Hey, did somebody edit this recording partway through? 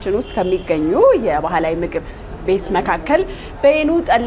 no; 0 cuts

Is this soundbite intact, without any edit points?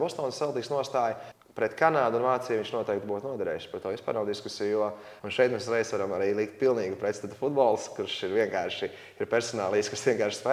no; 2 cuts; at 1.3 s, 5.1 s

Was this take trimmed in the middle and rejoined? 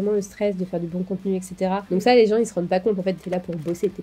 yes; 2 cuts; at 1.8 s, 3.2 s

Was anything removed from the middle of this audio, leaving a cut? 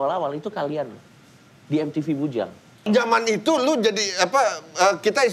yes; 1 cut; at 2.8 s

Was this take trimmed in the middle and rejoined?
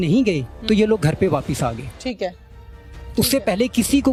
no; 0 cuts

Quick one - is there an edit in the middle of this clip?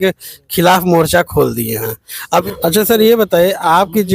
yes; 1 cut; at 2.1 s

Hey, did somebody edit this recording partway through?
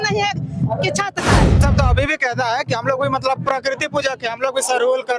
yes; 1 cut; at 1.6 s

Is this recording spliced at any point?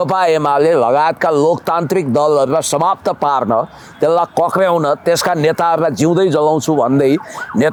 no; 0 cuts

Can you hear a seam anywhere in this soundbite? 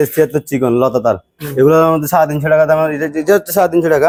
no; 0 cuts

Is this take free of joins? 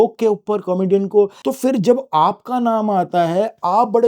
no; 1 cut; at 1.4 s

